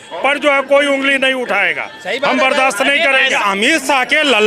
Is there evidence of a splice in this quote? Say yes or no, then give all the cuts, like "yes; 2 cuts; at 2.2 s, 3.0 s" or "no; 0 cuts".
yes; 1 cut; at 3.3 s